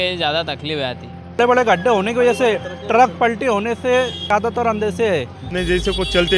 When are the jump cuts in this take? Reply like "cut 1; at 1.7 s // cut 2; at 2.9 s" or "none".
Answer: cut 1; at 1.4 s // cut 2; at 4.3 s // cut 3; at 5.4 s